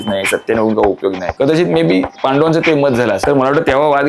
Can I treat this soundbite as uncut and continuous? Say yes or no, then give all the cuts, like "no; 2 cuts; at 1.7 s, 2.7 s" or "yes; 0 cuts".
no; 3 cuts; at 1.3 s, 2.1 s, 3.2 s